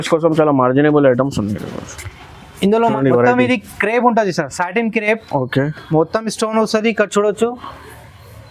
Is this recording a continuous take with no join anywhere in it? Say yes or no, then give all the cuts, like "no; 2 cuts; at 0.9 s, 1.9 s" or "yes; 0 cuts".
no; 1 cut; at 2.8 s